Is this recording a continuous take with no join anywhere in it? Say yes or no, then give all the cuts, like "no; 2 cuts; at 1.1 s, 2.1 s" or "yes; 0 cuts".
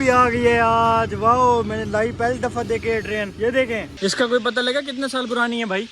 no; 1 cut; at 3.9 s